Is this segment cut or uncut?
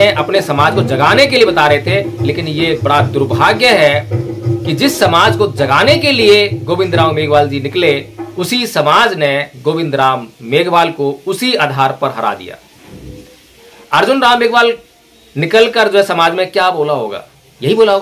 uncut